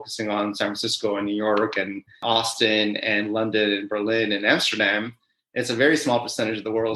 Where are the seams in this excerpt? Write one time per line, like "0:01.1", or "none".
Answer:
0:02.2